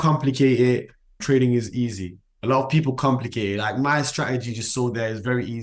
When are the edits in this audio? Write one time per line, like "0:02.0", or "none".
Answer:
0:01.1

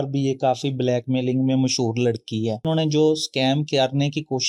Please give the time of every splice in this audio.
0:02.6

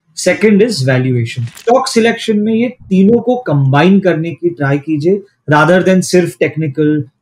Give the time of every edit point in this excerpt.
0:01.4

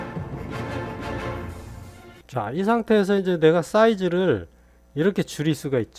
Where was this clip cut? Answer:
0:02.2

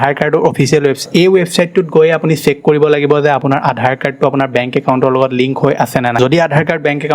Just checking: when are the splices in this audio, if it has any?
0:01.0
0:06.2

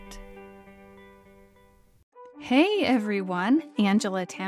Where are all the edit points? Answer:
0:02.1

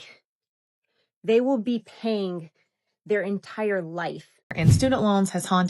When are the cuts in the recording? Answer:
0:04.8

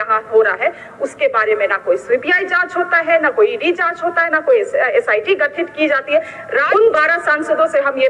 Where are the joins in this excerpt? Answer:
0:06.6

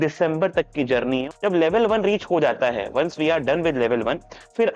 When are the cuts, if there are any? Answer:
0:01.2

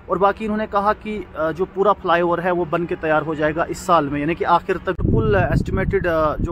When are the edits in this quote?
0:05.0

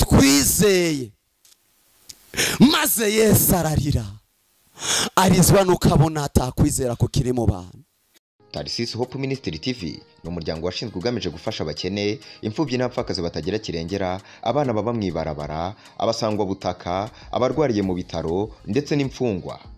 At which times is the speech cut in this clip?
0:08.4

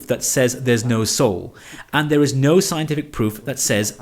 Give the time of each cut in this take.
none

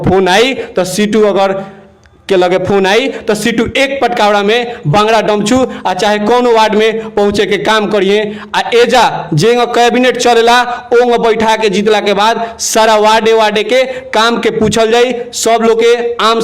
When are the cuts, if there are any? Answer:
none

